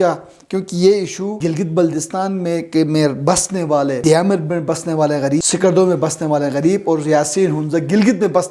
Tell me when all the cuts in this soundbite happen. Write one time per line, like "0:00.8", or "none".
0:01.3
0:04.0
0:05.5